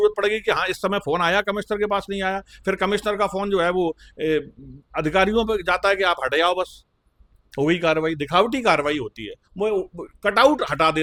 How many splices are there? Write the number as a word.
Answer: zero